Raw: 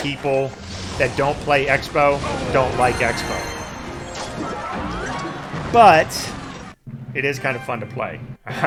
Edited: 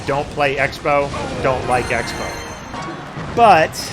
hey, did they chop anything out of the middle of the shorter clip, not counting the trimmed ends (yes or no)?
yes